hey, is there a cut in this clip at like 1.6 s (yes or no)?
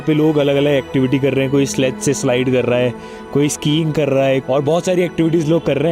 no